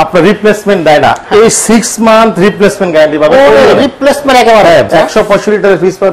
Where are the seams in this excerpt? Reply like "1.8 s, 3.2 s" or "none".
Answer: 4.9 s